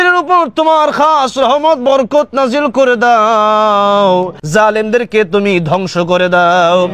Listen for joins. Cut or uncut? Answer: cut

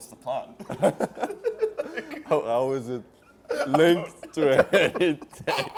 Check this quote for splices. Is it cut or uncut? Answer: uncut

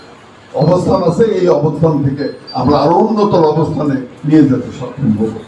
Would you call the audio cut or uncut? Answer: uncut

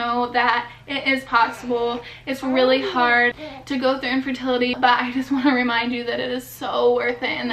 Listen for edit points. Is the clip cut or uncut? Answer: cut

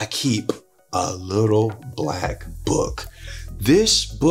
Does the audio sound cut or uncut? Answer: uncut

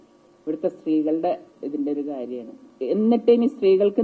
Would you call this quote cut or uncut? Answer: cut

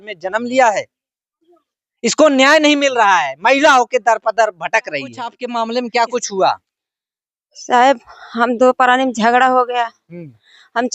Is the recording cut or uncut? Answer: cut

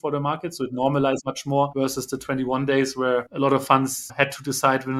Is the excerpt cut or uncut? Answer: cut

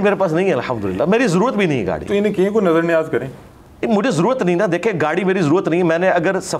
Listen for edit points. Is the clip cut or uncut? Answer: uncut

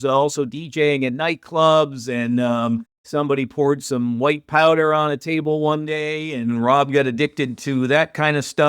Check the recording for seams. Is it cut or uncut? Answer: cut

